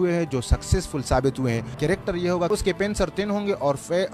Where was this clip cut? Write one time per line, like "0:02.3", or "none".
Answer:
0:01.7
0:02.5